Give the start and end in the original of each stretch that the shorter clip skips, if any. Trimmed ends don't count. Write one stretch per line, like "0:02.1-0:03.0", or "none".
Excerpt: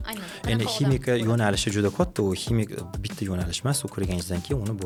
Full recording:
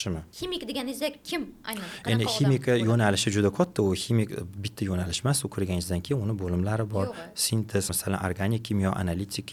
none